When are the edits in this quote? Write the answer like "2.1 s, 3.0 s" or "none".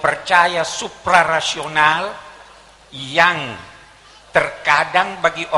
none